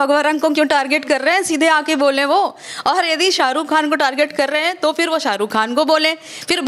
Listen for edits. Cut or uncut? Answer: uncut